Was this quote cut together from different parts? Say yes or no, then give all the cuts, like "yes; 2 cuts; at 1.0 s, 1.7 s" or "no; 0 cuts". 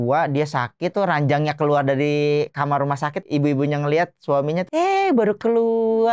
yes; 3 cuts; at 0.9 s, 3.2 s, 4.7 s